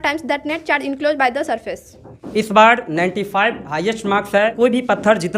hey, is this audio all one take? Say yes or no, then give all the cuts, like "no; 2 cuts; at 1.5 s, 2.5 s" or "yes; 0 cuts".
no; 2 cuts; at 2.0 s, 4.5 s